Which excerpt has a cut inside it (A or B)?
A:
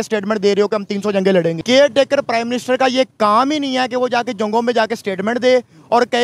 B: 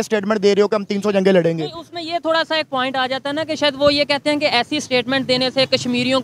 A